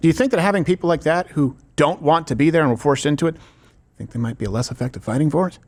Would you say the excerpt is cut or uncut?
uncut